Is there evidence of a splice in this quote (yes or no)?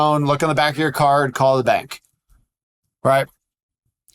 no